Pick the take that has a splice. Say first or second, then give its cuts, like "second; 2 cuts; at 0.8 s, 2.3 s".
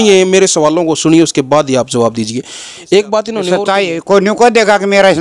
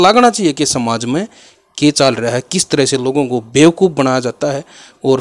first; 1 cut; at 3.5 s